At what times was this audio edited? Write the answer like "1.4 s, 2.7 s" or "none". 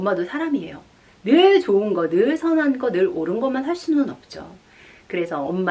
none